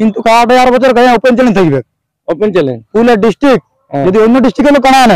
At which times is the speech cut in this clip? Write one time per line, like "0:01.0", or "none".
none